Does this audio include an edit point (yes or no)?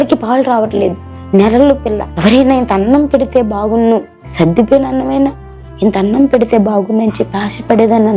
yes